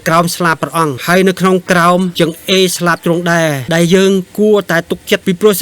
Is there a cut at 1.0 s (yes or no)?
yes